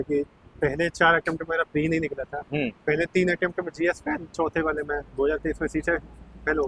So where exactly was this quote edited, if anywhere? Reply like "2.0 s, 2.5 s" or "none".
none

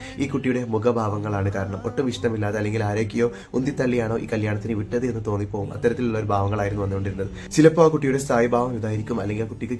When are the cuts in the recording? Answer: none

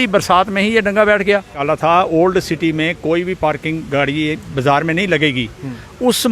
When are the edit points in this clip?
1.6 s

